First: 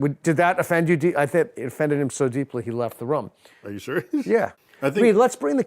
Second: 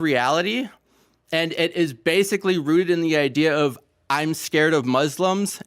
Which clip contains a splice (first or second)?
first